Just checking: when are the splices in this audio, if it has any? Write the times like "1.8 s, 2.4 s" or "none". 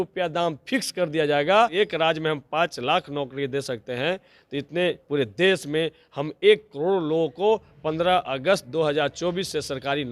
1.7 s